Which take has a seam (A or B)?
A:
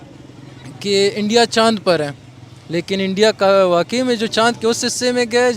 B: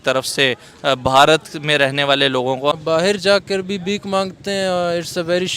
B